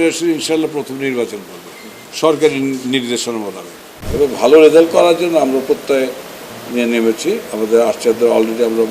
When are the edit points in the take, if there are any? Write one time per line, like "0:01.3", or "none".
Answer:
0:04.0